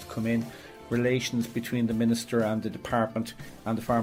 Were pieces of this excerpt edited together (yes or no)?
no